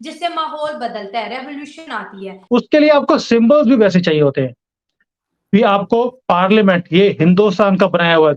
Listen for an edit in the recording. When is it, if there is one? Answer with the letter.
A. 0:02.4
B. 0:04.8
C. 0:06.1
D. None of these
A